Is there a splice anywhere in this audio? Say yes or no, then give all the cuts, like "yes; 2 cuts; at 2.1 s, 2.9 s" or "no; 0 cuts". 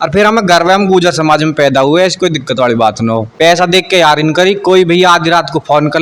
yes; 1 cut; at 3.3 s